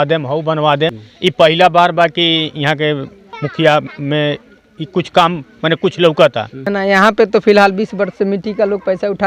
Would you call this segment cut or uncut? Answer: cut